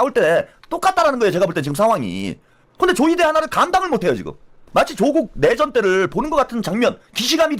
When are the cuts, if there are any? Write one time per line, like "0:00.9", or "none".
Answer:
0:04.6